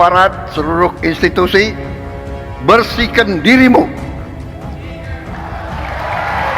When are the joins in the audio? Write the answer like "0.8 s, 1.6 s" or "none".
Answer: 1.0 s

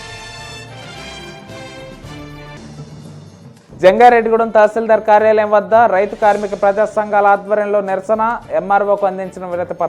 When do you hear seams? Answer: 2.6 s, 3.5 s

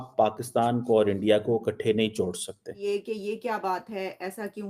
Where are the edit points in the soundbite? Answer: 2.8 s

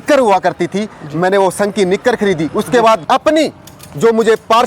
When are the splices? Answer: 3.0 s

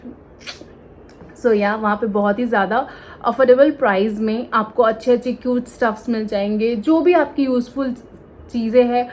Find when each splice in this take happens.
none

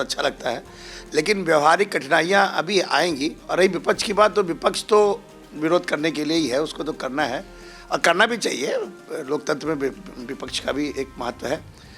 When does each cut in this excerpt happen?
none

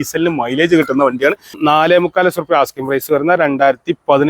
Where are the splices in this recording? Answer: 1.5 s

